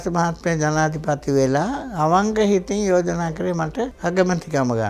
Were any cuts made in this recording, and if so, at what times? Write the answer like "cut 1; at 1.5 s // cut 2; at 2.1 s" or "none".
cut 1; at 3.9 s